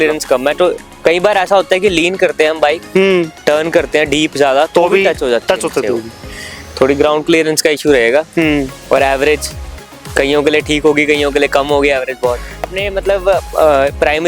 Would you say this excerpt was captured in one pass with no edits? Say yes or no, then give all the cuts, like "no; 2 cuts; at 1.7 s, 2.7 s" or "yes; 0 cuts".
no; 1 cut; at 12.8 s